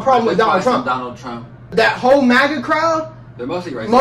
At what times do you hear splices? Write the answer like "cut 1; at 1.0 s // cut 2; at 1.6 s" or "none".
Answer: cut 1; at 1.7 s